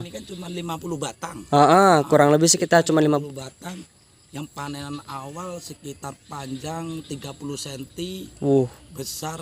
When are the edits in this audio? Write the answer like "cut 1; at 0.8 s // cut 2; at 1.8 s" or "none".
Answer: none